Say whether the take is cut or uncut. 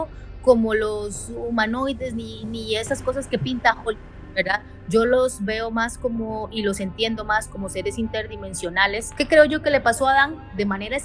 cut